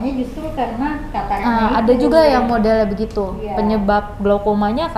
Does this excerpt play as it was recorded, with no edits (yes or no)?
yes